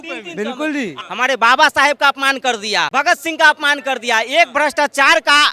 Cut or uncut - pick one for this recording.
cut